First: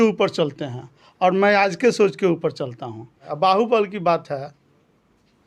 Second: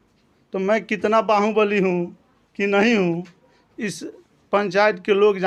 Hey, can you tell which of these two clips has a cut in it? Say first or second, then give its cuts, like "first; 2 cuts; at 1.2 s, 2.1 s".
first; 1 cut; at 3.2 s